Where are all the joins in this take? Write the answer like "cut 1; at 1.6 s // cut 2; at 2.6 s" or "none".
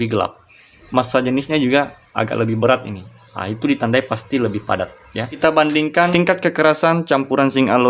cut 1; at 0.8 s // cut 2; at 5.3 s // cut 3; at 6.1 s